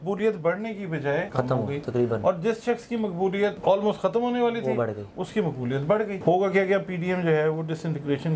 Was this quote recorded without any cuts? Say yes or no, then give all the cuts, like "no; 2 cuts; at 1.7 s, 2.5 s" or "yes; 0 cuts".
no; 3 cuts; at 1.3 s, 3.6 s, 6.2 s